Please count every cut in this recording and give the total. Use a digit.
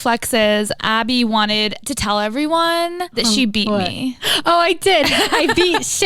3